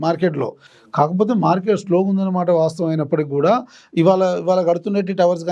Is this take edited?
no; 0 cuts

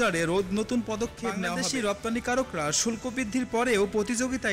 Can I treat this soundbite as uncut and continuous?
no; 1 cut; at 1.5 s

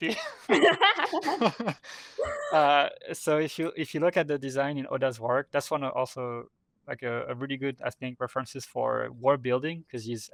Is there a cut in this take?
no; 0 cuts

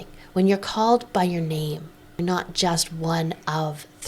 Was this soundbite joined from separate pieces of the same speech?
yes; 1 cut; at 2.2 s

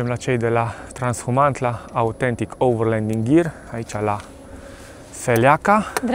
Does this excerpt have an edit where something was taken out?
no; 0 cuts

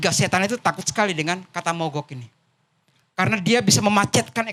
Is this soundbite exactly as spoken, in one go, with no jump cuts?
yes; 0 cuts

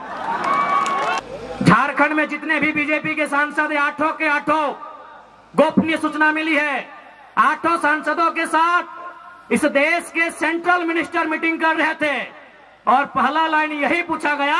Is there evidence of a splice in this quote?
yes; 1 cut; at 1.2 s

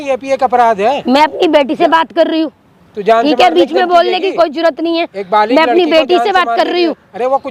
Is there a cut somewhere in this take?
no; 0 cuts

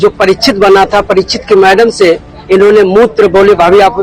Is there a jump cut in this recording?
no; 0 cuts

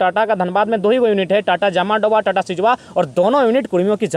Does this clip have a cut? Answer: no; 0 cuts

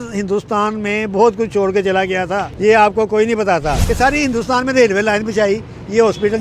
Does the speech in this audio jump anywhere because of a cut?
yes; 2 cuts; at 2.5 s, 3.8 s

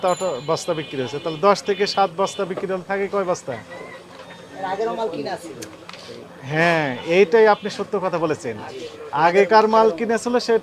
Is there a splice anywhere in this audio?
no; 0 cuts

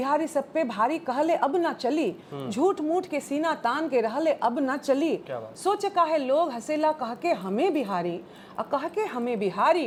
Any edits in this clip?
no; 0 cuts

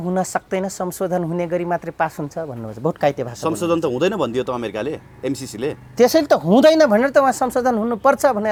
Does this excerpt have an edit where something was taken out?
no; 0 cuts

